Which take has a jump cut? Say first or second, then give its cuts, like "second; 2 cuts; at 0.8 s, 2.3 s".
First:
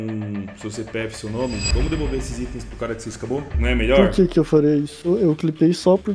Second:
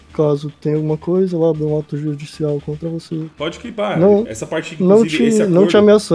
first; 2 cuts; at 3.6 s, 5.0 s